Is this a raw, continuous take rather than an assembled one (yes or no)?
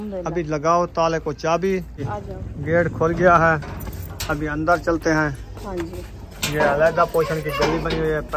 no